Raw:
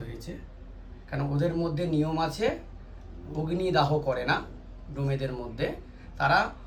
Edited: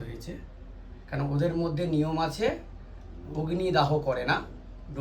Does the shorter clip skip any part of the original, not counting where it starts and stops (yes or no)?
no